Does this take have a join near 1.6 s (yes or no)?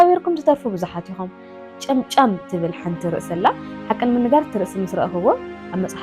yes